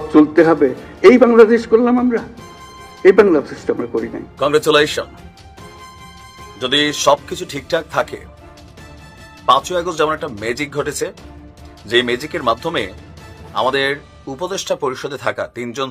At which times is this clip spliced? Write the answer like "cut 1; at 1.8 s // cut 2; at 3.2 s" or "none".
cut 1; at 4.2 s